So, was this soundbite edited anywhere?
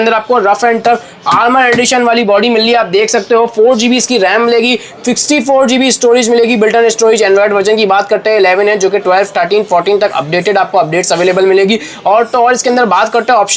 no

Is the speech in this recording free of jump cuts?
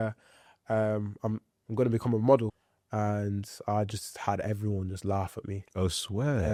yes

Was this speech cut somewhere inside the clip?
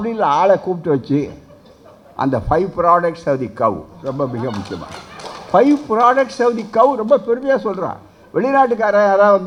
no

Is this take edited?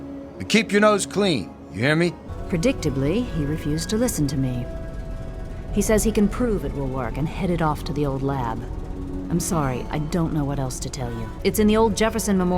yes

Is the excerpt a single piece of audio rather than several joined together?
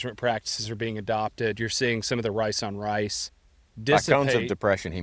yes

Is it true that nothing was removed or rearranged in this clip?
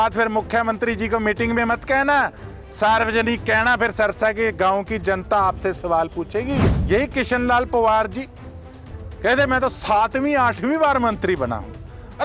no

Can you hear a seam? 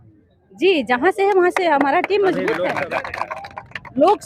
yes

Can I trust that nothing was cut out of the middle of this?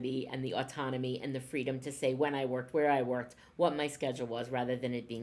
yes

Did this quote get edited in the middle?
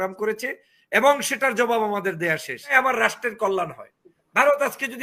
yes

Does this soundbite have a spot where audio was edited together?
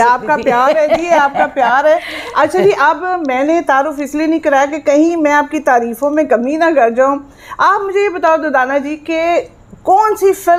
no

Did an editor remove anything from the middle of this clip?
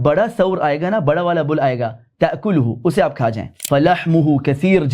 yes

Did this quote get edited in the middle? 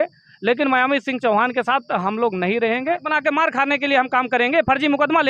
yes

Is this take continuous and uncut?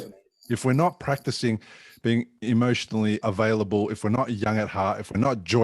no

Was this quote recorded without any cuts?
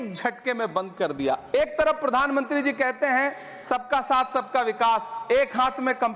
no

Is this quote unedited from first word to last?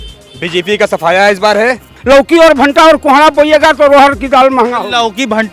no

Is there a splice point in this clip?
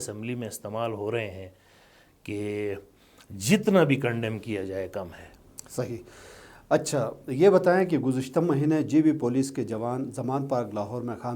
no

